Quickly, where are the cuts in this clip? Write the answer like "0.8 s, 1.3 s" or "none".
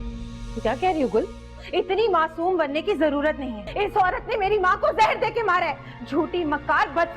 3.6 s